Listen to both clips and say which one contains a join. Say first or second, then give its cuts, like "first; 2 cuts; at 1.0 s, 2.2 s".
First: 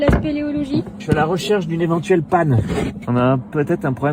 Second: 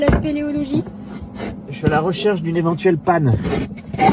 first; 2 cuts; at 1.0 s, 3.0 s